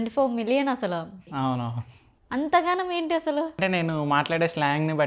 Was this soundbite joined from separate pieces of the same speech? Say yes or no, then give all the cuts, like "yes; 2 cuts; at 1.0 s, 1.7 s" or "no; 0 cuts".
yes; 2 cuts; at 1.2 s, 3.6 s